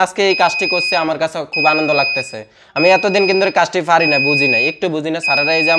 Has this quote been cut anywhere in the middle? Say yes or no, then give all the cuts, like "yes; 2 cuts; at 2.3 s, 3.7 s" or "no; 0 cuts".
no; 0 cuts